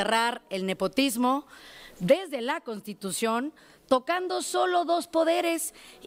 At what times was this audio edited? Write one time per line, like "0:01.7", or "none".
none